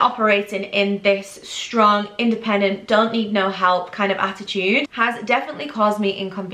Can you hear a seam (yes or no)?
no